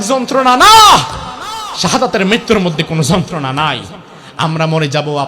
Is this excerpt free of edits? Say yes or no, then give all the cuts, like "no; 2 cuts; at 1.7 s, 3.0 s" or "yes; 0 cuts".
yes; 0 cuts